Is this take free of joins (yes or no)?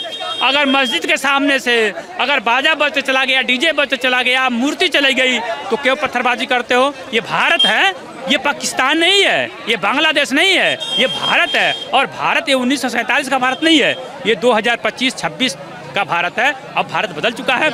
yes